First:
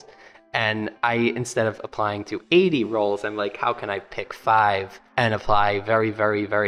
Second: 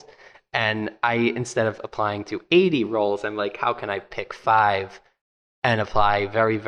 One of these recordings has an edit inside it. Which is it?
first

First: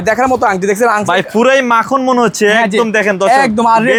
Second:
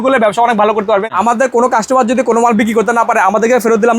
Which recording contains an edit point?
second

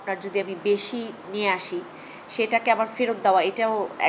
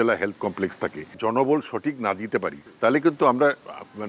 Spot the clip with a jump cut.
second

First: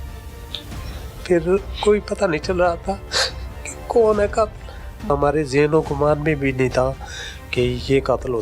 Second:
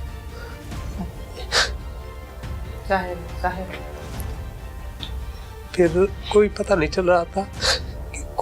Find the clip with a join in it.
first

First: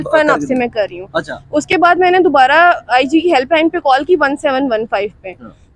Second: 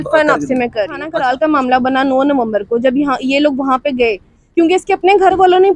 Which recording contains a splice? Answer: second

